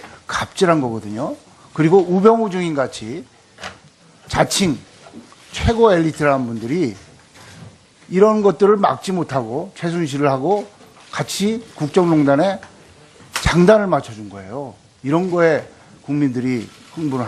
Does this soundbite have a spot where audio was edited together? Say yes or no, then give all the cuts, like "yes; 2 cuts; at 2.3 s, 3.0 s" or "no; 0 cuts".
no; 0 cuts